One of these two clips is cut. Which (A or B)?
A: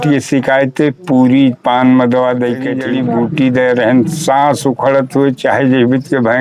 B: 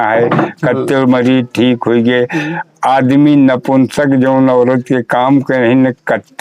A